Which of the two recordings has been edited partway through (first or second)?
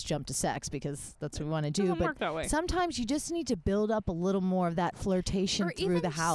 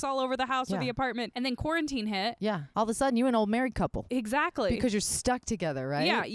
second